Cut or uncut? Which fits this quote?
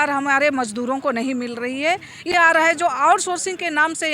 cut